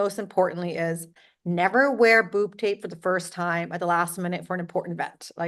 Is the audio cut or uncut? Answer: uncut